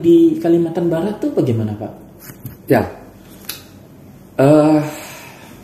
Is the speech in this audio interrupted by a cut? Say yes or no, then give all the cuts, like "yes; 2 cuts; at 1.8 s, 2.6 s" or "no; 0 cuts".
no; 0 cuts